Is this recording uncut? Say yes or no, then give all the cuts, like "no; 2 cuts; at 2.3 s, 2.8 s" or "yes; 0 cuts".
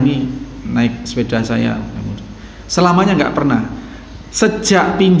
yes; 0 cuts